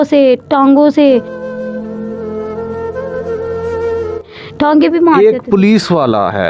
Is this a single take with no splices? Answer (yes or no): yes